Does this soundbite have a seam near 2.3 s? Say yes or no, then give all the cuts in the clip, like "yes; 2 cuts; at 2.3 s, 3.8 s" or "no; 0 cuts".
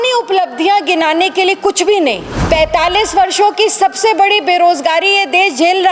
yes; 1 cut; at 2.3 s